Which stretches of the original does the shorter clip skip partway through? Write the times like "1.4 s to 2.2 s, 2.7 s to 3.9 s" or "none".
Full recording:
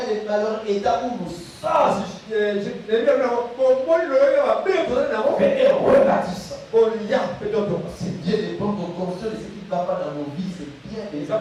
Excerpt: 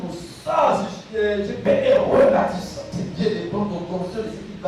2.8 s to 5.4 s, 6.6 s to 7.9 s

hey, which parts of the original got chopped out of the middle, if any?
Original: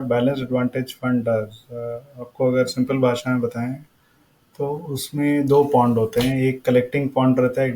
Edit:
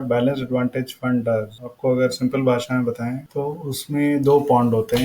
1.6 s to 2.2 s, 3.8 s to 4.5 s

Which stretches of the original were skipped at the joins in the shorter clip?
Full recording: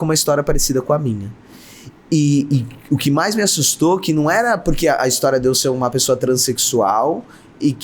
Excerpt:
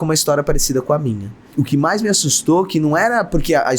1.4 s to 2.7 s

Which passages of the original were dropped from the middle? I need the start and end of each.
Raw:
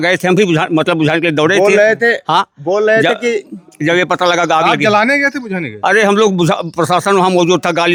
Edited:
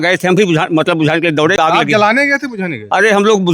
1.6 s to 4.5 s

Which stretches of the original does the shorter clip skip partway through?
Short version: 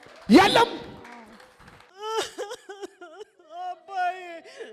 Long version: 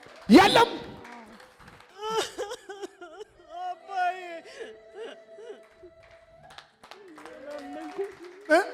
none

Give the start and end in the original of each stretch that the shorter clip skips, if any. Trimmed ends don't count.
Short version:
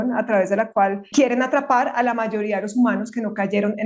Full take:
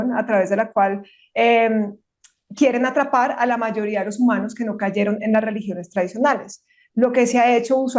1.0 s to 2.4 s

